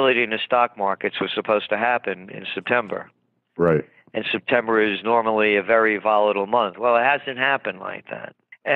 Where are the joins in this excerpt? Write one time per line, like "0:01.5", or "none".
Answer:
0:05.5